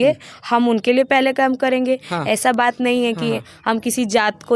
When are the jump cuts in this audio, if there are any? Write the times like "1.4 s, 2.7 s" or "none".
none